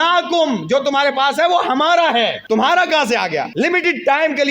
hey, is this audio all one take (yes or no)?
no